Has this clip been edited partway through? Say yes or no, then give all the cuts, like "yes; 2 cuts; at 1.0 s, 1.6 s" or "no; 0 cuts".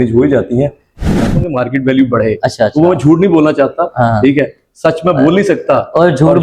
yes; 1 cut; at 1.1 s